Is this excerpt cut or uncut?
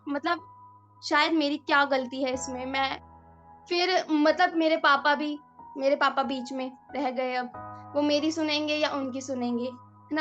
uncut